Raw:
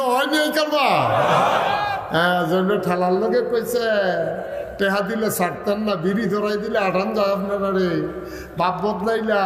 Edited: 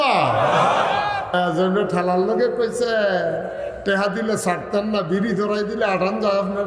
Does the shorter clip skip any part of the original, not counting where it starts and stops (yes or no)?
yes